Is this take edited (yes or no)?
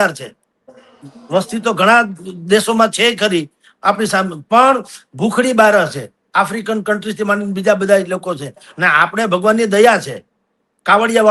no